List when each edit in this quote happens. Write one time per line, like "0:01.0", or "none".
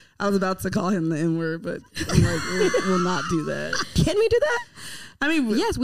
0:04.0